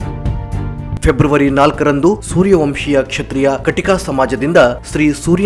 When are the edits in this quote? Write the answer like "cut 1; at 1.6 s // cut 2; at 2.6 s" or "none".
cut 1; at 0.9 s